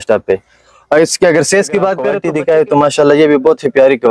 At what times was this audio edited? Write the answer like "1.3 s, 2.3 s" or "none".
2.1 s